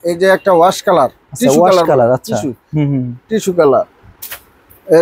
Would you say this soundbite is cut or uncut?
uncut